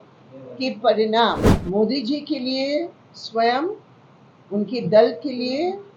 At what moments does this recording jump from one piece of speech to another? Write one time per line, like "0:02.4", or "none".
0:01.5